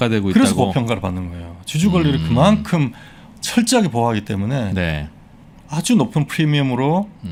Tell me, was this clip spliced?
no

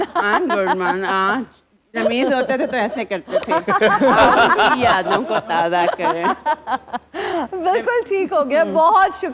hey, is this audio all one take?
yes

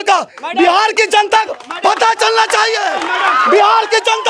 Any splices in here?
no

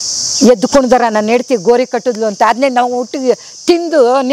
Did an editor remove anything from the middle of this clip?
no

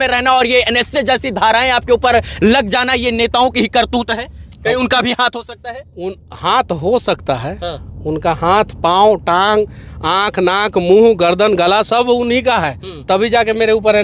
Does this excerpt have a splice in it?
no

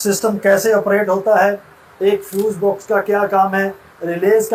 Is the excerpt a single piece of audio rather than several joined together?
yes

